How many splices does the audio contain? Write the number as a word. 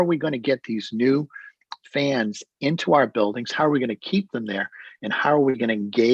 zero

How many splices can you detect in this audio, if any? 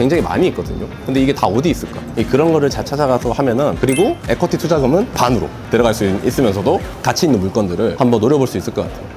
two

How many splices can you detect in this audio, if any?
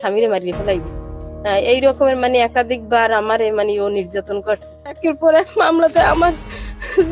one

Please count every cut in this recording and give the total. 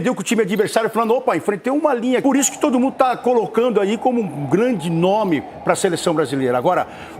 one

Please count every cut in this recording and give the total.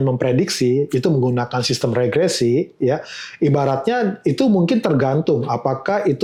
zero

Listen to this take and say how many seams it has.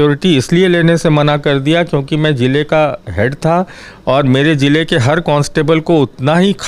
zero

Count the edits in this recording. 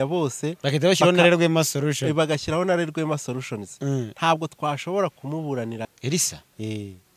one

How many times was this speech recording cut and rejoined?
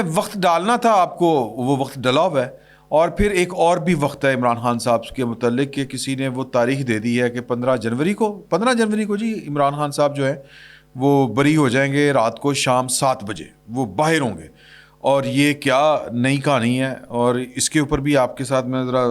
zero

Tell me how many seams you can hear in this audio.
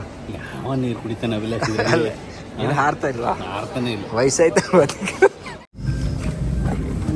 one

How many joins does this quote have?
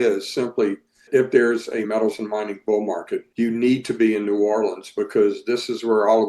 three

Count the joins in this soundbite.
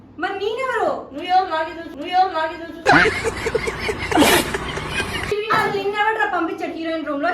one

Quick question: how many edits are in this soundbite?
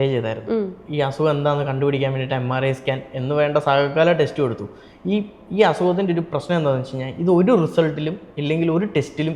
zero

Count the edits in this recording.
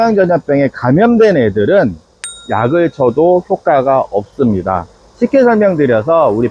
zero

